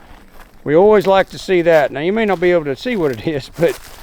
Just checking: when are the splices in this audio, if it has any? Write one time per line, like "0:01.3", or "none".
none